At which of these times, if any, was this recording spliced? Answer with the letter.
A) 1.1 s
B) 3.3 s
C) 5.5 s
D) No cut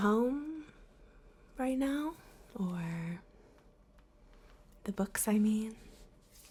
D